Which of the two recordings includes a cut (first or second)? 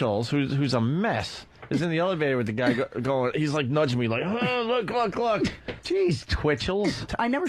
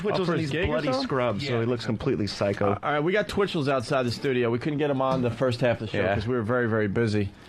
second